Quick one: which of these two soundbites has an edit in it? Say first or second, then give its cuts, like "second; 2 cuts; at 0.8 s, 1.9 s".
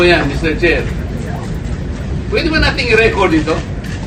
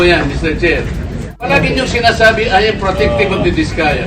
second; 1 cut; at 1.5 s